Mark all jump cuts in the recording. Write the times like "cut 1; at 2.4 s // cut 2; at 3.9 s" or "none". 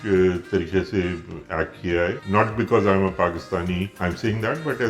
cut 1; at 2.2 s // cut 2; at 3.9 s